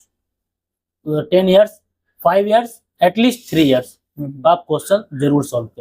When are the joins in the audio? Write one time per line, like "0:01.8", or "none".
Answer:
none